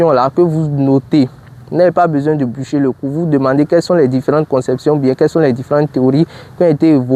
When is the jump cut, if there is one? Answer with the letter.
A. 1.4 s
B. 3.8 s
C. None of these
C